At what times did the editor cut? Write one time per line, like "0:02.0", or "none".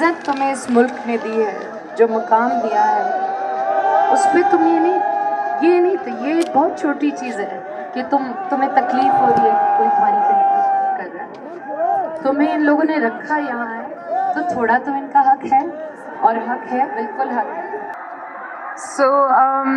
0:17.9